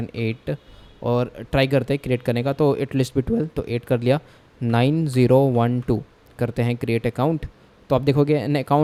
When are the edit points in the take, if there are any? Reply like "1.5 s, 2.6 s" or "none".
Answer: none